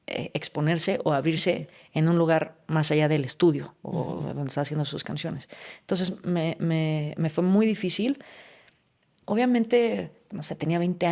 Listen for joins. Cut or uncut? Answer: uncut